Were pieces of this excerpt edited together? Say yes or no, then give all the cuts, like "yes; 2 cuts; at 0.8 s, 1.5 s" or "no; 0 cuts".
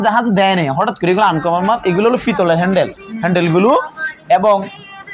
no; 0 cuts